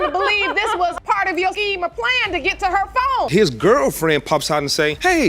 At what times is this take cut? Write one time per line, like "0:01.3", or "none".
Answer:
0:03.3